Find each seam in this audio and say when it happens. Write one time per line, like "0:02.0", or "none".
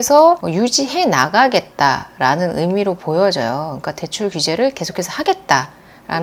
none